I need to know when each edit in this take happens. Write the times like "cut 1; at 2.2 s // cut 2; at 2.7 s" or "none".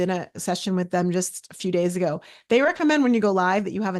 none

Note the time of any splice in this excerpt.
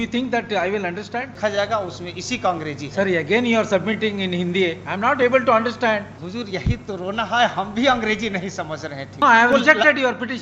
cut 1; at 1.4 s // cut 2; at 6.2 s // cut 3; at 9.2 s

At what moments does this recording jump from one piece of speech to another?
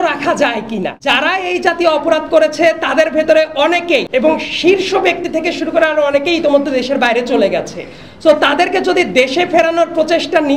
cut 1; at 0.9 s // cut 2; at 4.1 s

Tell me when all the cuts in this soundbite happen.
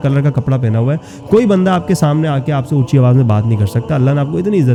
none

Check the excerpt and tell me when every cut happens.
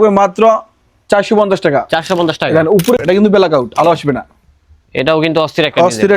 cut 1; at 3.0 s

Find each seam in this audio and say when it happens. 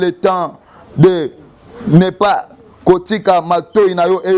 none

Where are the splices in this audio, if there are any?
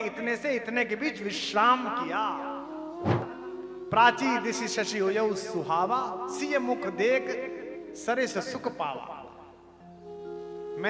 cut 1; at 3.2 s

